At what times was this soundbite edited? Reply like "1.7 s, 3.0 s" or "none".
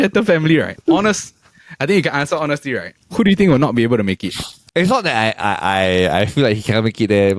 4.5 s

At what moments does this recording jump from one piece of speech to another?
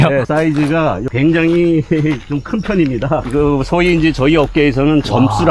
none

